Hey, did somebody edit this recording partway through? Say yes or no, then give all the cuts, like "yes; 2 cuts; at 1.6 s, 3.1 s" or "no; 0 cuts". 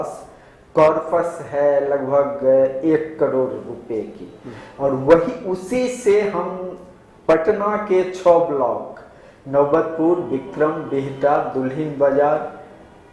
no; 0 cuts